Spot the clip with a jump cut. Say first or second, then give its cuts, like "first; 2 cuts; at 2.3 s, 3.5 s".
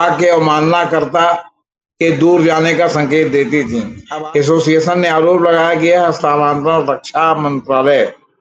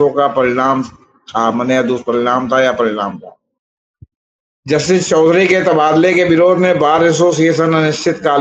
first; 1 cut; at 4.0 s